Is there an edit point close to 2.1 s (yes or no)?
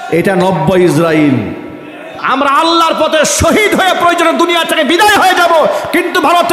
yes